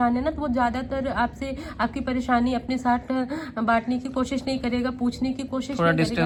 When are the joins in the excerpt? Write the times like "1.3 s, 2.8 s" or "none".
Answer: none